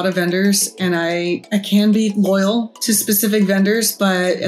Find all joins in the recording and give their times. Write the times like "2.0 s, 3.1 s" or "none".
1.4 s